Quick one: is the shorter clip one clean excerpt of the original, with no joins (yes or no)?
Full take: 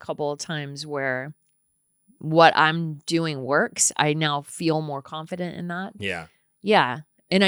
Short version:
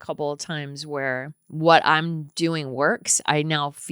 no